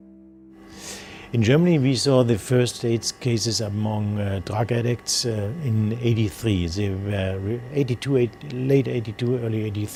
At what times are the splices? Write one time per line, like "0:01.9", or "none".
none